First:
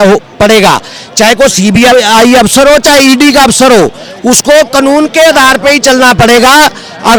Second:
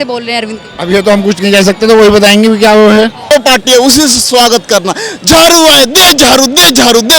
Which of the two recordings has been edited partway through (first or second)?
second